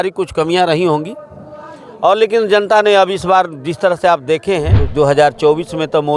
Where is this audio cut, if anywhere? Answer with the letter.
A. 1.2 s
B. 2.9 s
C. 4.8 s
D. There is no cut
C